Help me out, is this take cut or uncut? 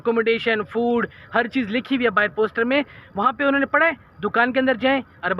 uncut